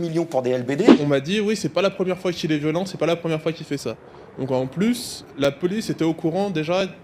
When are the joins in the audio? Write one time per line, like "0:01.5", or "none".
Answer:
0:00.9